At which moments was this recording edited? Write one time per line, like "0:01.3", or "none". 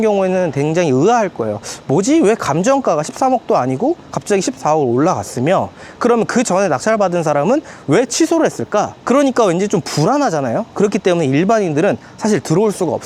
none